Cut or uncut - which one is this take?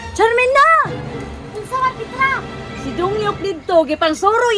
uncut